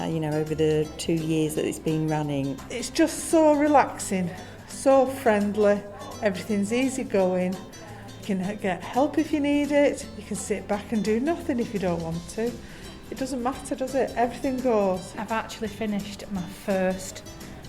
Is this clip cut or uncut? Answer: cut